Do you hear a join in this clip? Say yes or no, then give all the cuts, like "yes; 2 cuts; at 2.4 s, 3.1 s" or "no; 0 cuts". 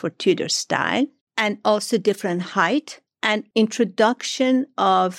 yes; 1 cut; at 3.4 s